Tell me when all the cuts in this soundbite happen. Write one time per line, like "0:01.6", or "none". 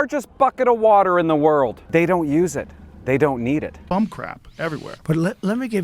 0:03.8

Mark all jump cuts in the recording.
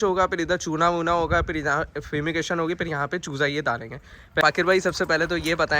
0:04.4

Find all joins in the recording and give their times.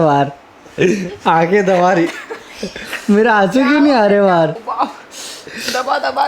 0:04.6

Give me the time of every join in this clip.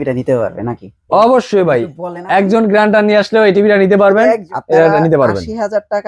0:04.5

